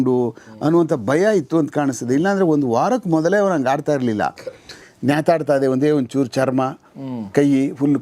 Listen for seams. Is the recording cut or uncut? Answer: cut